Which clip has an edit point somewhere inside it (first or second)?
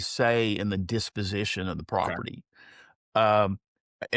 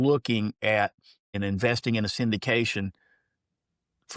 second